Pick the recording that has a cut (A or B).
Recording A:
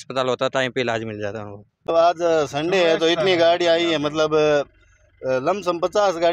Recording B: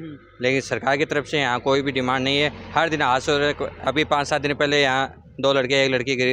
A